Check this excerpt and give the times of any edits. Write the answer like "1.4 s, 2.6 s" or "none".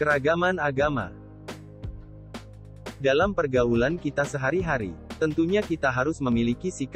1.1 s, 3.0 s